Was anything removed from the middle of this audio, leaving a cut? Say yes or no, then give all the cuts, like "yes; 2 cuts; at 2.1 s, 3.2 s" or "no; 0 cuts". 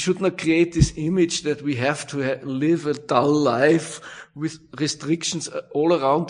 no; 0 cuts